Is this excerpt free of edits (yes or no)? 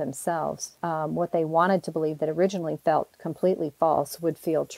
yes